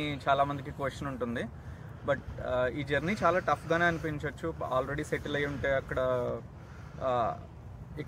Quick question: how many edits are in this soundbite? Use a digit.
0